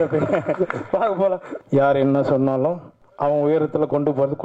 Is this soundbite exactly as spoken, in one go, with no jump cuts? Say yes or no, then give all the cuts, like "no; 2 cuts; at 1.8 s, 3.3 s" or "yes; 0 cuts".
no; 1 cut; at 1.5 s